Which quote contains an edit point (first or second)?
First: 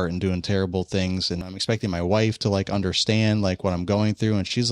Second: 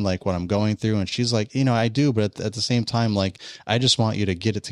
first